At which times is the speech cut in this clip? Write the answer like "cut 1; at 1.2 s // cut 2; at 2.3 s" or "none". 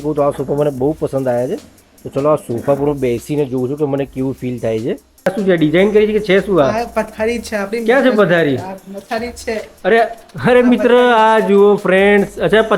cut 1; at 5.3 s